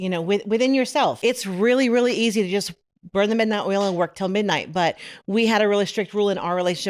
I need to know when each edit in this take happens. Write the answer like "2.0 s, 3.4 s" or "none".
1.2 s